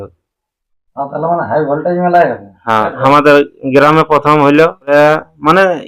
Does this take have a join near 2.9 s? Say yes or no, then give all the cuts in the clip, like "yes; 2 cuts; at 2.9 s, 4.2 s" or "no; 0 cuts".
yes; 2 cuts; at 2.9 s, 4.9 s